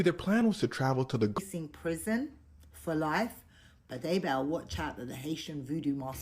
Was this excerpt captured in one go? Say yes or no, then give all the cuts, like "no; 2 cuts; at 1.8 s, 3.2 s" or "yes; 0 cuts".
no; 1 cut; at 1.4 s